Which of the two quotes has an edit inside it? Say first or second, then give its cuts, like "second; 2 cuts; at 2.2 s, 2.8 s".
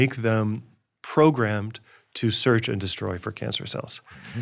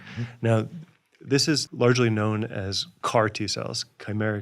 second; 2 cuts; at 1.6 s, 2.9 s